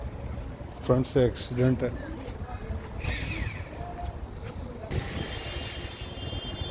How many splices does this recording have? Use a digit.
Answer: 1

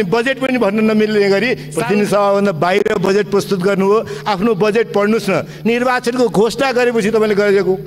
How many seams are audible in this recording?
1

